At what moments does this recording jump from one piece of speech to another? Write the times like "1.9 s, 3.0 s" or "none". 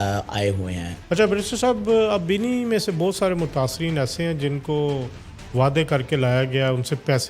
0.9 s